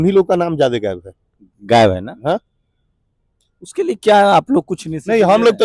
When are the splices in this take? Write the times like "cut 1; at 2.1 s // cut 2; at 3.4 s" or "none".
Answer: none